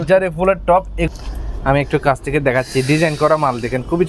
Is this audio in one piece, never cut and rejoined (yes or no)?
no